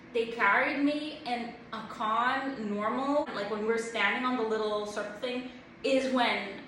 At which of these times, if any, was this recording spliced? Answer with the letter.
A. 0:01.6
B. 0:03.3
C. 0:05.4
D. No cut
B